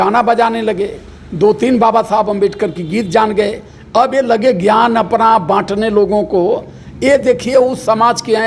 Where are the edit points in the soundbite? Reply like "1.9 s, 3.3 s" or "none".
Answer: none